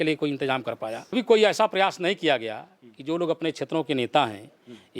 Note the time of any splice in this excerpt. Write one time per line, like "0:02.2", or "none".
0:01.1